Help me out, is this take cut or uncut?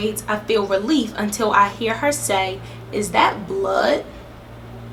uncut